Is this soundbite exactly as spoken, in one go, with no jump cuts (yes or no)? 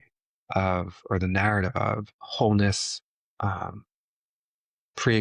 no